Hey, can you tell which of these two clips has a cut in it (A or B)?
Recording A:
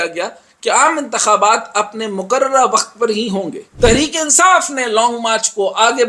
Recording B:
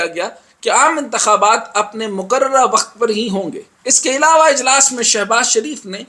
A